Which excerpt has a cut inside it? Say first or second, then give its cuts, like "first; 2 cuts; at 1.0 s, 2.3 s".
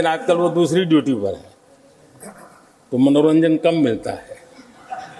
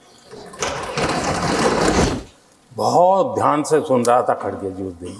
second; 1 cut; at 2.0 s